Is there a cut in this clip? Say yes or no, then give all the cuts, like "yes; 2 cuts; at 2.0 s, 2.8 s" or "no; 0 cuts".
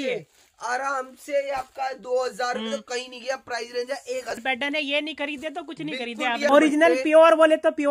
yes; 2 cuts; at 4.4 s, 6.5 s